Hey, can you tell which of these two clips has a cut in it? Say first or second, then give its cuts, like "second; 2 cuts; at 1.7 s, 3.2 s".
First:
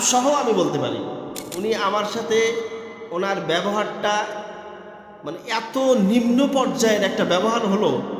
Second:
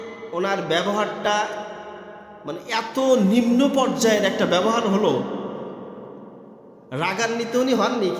first; 1 cut; at 1.4 s